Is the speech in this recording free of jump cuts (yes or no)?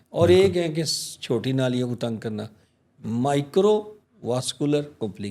yes